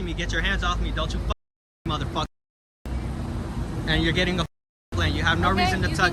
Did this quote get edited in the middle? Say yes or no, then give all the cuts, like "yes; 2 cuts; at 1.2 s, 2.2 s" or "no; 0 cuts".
no; 0 cuts